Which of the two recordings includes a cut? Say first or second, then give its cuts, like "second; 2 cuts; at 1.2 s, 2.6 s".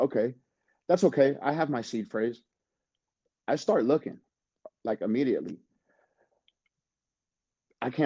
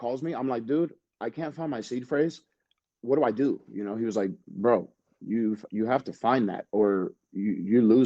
second; 1 cut; at 2.8 s